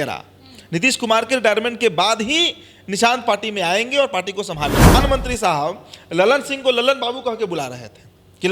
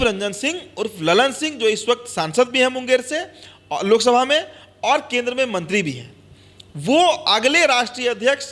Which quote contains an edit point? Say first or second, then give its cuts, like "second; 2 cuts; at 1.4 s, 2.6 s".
first; 1 cut; at 4.9 s